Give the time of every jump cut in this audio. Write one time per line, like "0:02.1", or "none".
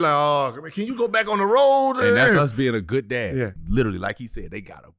0:03.6